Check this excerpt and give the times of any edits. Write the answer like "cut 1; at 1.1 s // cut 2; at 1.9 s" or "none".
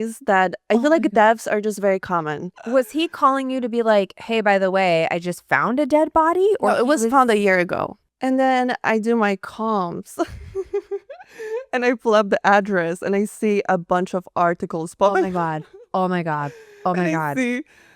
cut 1; at 2.6 s // cut 2; at 8.0 s